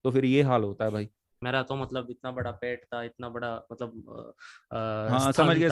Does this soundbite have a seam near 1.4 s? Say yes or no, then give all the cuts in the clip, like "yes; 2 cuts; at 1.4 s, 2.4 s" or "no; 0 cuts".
yes; 1 cut; at 1.4 s